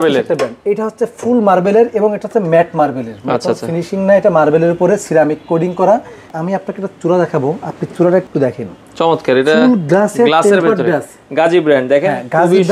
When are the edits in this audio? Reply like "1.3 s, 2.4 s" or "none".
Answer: 6.3 s, 8.3 s

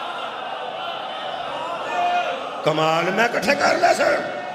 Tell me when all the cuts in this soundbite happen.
none

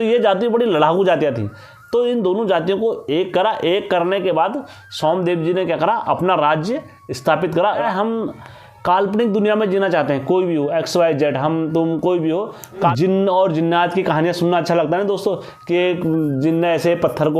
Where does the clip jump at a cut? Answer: 7.8 s, 12.9 s

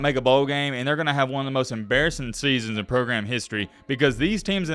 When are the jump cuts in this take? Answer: none

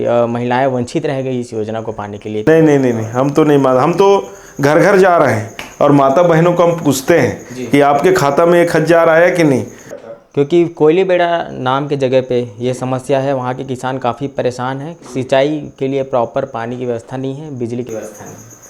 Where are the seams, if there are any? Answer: 2.4 s, 10.1 s

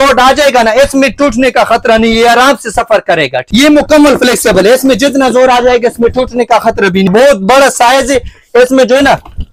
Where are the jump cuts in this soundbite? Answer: 3.4 s, 7.1 s

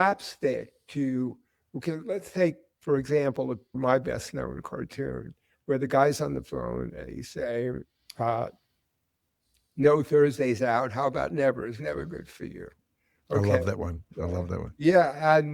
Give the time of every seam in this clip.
3.7 s

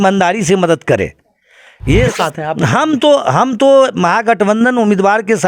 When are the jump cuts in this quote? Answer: 2.1 s

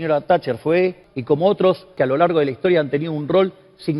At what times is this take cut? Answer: 1.1 s, 1.9 s

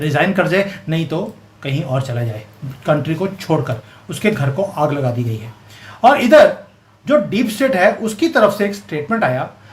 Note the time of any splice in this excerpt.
none

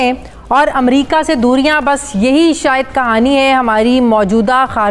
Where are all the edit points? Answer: none

